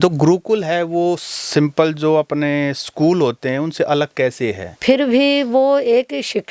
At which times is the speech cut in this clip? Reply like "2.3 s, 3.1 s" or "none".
4.7 s